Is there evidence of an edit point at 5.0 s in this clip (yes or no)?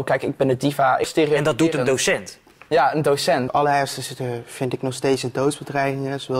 no